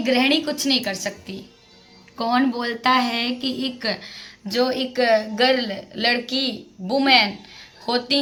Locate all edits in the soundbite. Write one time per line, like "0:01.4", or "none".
none